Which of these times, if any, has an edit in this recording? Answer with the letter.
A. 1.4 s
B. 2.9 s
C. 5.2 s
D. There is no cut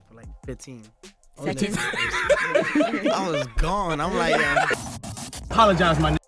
C